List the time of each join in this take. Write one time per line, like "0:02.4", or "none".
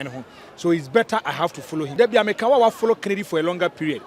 0:01.9